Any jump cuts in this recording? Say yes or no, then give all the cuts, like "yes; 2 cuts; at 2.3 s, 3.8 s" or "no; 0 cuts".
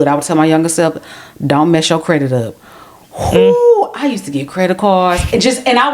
no; 0 cuts